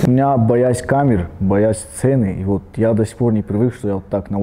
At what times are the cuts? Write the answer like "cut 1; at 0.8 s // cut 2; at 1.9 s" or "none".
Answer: none